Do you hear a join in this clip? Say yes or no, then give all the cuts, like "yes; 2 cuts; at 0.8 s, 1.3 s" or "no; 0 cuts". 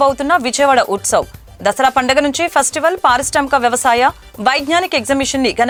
no; 0 cuts